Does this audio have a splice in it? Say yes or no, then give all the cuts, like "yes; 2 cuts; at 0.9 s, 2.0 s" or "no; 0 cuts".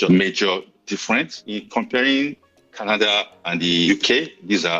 yes; 1 cut; at 3.9 s